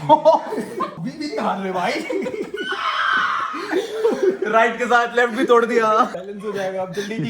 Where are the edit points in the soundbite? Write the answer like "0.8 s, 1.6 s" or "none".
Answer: 1.0 s, 6.2 s

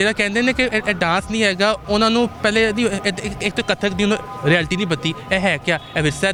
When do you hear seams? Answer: none

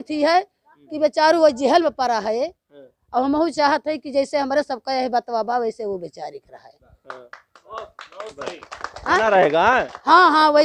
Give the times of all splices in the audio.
none

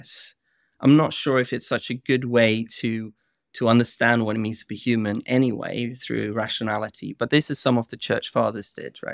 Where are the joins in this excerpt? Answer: none

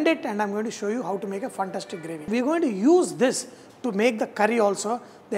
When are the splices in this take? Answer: 2.3 s

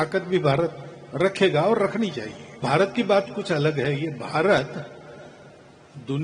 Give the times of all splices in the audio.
2.6 s

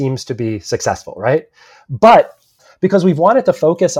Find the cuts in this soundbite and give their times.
2.6 s

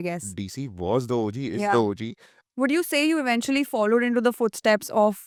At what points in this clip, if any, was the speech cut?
none

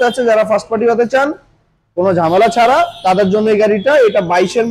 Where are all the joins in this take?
none

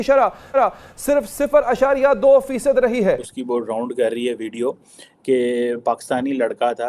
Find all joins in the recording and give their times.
3.3 s

